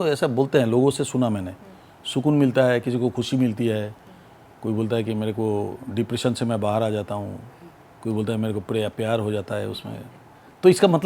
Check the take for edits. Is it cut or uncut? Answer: uncut